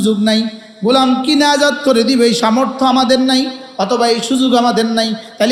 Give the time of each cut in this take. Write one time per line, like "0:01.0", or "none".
none